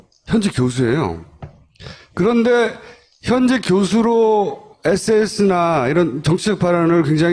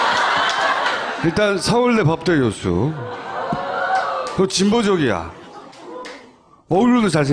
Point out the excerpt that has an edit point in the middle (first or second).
first